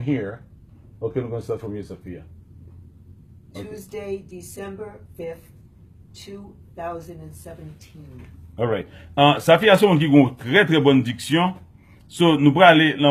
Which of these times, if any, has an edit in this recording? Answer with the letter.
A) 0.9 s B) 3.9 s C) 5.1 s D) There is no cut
D